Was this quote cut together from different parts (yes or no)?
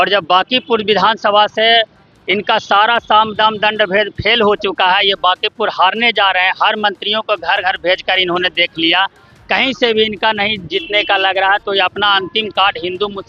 no